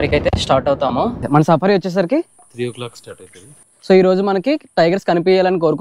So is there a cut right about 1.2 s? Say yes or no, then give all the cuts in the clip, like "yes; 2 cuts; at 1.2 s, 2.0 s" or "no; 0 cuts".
yes; 1 cut; at 1.2 s